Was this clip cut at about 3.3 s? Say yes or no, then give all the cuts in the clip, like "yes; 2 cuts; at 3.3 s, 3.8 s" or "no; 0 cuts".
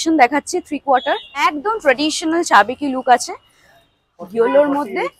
no; 1 cut; at 1.5 s